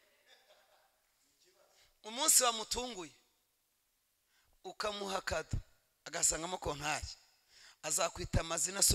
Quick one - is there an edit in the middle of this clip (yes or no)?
no